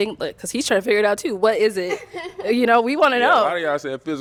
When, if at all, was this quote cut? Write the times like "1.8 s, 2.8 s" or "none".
none

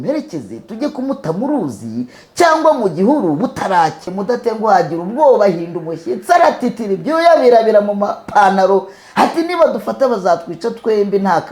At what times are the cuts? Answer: 4.2 s

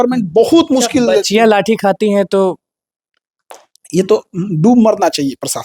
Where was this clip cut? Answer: none

